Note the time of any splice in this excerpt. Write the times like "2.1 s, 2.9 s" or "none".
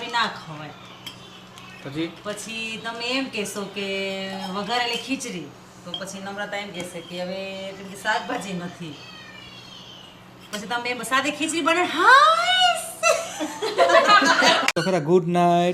14.8 s